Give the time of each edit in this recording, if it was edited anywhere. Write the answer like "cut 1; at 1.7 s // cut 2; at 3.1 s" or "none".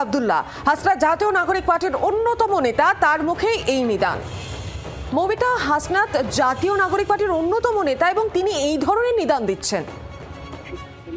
cut 1; at 4.9 s